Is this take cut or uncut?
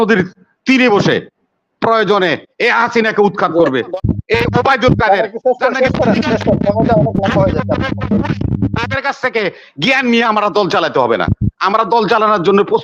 cut